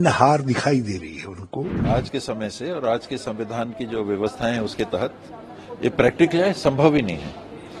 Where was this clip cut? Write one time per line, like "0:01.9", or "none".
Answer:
0:01.8